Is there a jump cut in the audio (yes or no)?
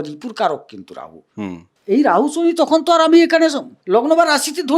yes